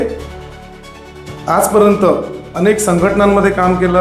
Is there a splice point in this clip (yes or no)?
no